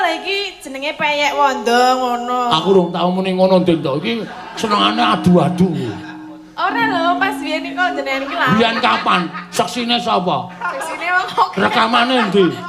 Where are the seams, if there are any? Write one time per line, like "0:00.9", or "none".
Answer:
none